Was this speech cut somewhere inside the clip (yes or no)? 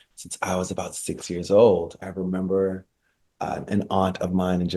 yes